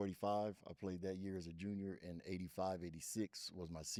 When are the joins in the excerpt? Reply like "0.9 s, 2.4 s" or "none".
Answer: none